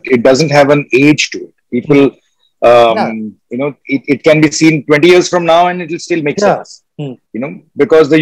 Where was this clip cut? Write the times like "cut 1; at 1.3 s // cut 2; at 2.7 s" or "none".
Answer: none